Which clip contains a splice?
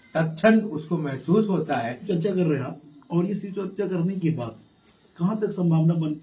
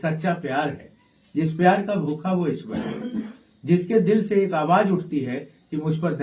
first; 1 cut; at 2.0 s

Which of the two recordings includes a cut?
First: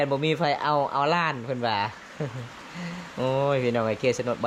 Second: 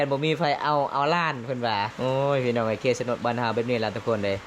second; 1 cut; at 1.9 s

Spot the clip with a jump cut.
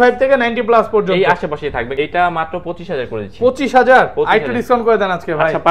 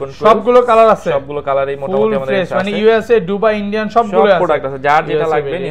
first; 1 cut; at 1.9 s

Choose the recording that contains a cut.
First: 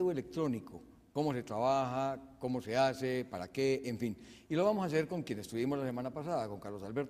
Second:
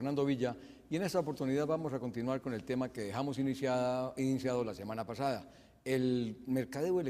second; 1 cut; at 4.8 s

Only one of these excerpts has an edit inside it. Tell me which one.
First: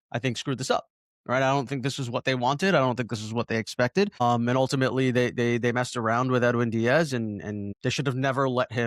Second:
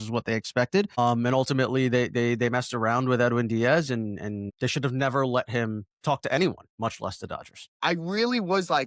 second; 1 cut; at 7.8 s

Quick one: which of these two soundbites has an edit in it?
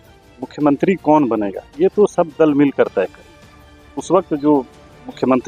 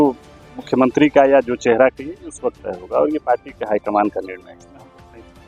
second; 1 cut; at 4.6 s

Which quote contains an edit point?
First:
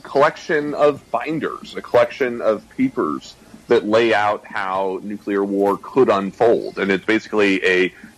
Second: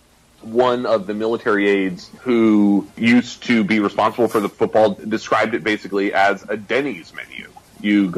second; 3 cuts; at 2.1 s, 2.9 s, 4.5 s

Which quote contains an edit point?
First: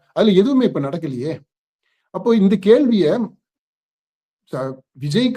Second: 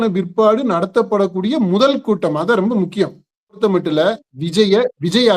second; 1 cut; at 3.6 s

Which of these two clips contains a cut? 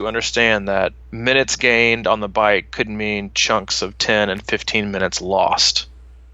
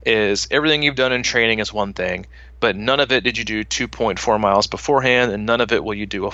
first; 1 cut; at 1.1 s

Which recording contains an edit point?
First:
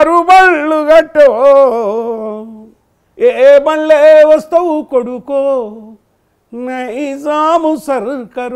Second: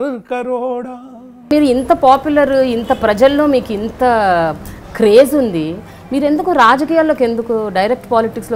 second; 1 cut; at 1.5 s

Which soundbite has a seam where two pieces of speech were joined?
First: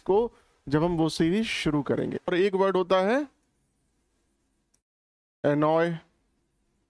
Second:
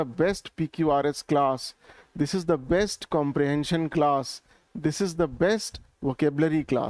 first; 1 cut; at 2.3 s

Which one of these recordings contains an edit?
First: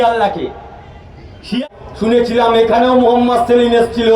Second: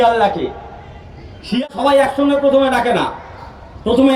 first; 1 cut; at 1.7 s

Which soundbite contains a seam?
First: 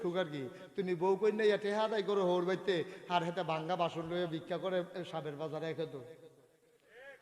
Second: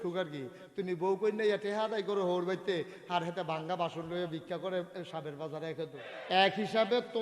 second; 1 cut; at 6.1 s

